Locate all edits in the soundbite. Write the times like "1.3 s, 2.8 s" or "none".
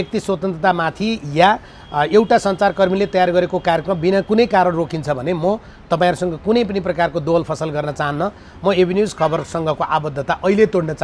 none